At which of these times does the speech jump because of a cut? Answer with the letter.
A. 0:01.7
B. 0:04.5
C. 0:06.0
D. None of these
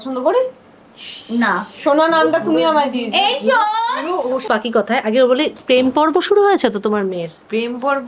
B